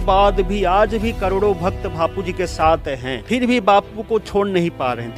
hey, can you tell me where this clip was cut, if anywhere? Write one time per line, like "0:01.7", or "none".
0:03.1